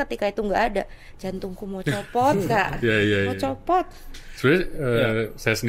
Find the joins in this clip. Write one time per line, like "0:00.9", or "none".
none